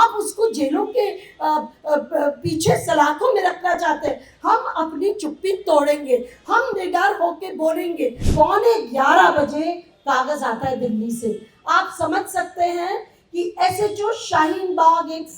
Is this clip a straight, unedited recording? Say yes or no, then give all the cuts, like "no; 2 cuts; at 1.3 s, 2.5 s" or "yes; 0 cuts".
no; 1 cut; at 8.2 s